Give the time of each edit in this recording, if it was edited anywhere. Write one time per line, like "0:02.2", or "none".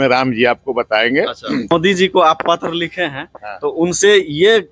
0:01.7